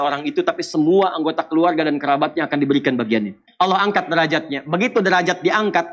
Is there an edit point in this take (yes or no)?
yes